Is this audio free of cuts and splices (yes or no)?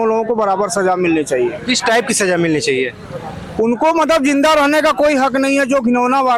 yes